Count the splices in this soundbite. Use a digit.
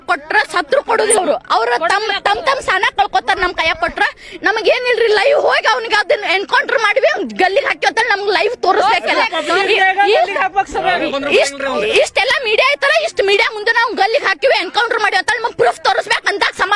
1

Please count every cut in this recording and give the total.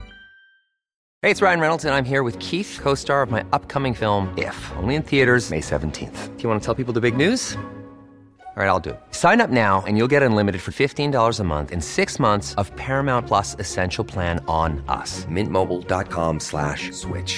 1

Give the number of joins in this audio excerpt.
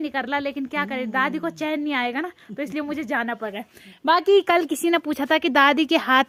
0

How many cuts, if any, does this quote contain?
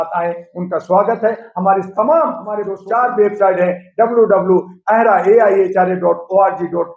1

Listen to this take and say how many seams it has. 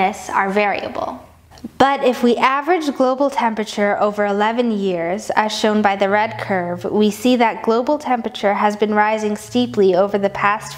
0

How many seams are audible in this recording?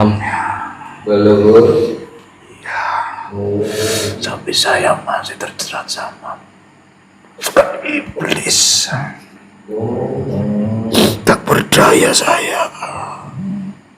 1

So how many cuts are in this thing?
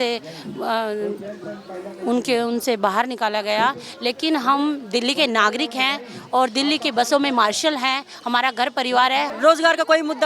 1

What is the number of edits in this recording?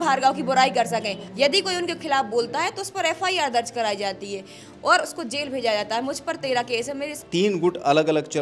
2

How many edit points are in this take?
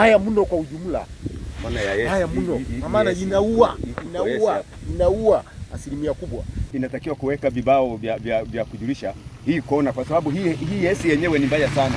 1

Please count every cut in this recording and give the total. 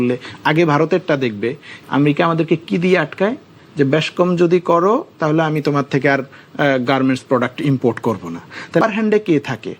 2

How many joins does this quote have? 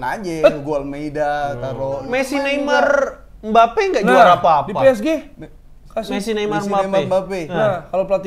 1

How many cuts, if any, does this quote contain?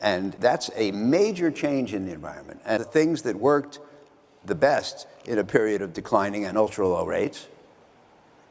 1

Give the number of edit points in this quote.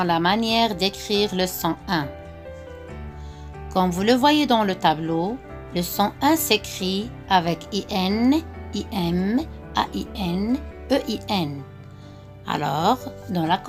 0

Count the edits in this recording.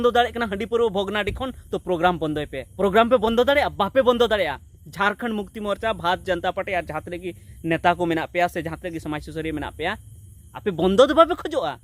1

